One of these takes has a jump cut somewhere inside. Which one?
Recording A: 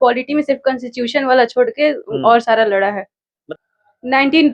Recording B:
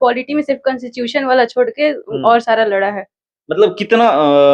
A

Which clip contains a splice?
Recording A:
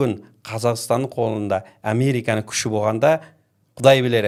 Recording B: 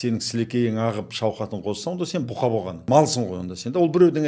B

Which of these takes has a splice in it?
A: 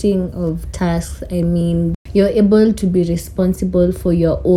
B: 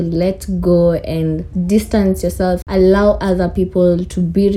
B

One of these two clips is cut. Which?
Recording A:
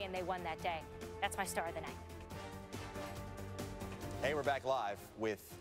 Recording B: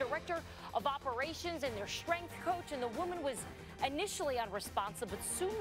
A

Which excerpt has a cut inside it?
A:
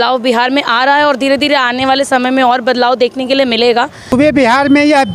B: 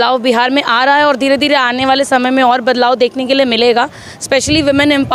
A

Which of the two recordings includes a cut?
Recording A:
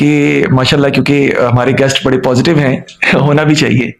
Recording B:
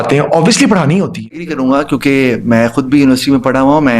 B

